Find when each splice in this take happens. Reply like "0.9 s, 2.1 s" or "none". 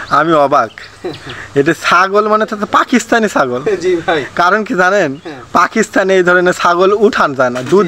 none